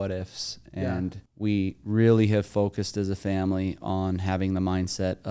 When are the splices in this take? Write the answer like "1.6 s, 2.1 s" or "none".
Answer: 1.2 s